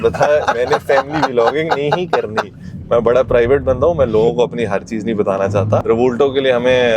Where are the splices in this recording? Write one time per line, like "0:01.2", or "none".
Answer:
0:05.8